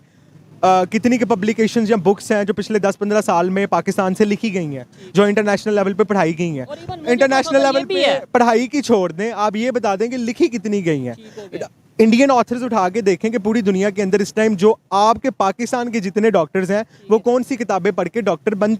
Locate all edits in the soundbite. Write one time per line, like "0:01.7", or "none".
none